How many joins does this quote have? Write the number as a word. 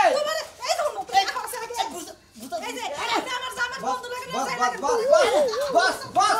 zero